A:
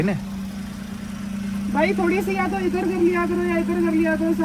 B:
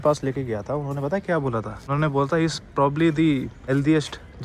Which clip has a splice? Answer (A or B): B